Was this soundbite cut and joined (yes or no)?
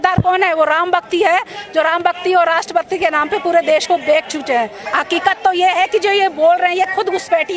yes